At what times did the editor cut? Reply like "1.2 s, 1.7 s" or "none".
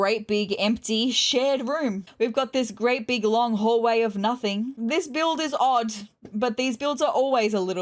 2.1 s, 4.7 s